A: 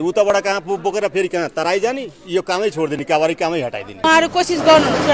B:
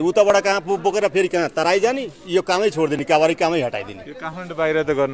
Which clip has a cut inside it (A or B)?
A